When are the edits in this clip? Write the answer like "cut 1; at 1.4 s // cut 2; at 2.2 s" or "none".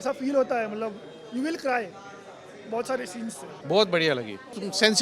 none